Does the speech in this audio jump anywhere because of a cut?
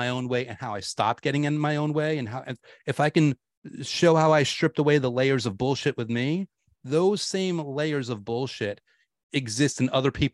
no; 0 cuts

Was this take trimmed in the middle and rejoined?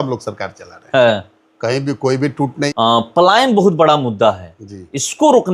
yes; 1 cut; at 2.7 s

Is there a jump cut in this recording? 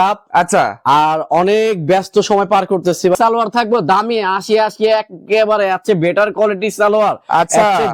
yes; 1 cut; at 3.2 s

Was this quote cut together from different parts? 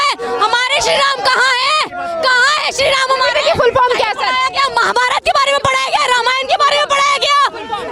no; 0 cuts

